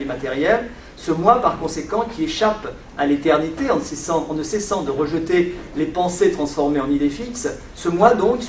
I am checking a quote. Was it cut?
yes; 1 cut; at 1.7 s

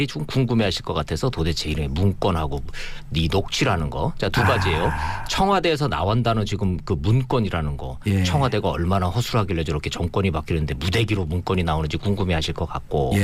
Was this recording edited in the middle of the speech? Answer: no; 0 cuts

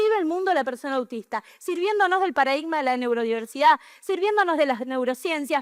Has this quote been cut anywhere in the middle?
no; 0 cuts

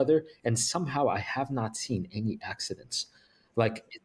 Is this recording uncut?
yes; 0 cuts

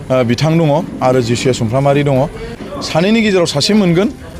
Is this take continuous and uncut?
no; 1 cut; at 2.6 s

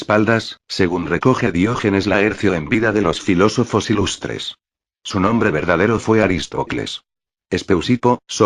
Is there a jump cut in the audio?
yes; 1 cut; at 3.5 s

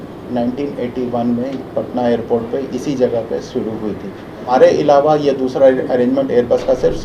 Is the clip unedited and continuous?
no; 1 cut; at 4.5 s

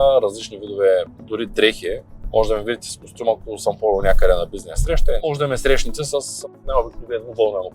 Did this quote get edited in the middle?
yes; 2 cuts; at 2.1 s, 5.2 s

